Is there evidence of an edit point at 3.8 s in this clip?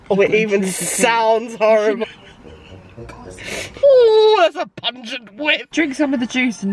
yes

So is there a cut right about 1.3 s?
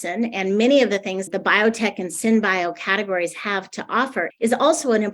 yes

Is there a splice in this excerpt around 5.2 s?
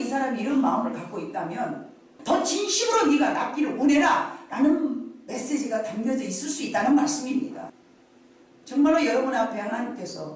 no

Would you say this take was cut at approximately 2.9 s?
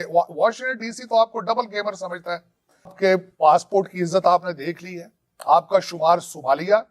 yes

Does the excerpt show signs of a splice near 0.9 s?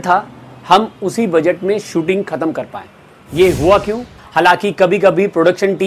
no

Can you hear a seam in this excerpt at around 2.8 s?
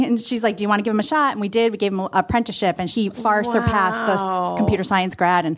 yes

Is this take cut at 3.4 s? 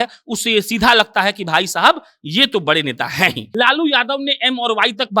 yes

